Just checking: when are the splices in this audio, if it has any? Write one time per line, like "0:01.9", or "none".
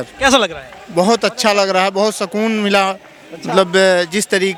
none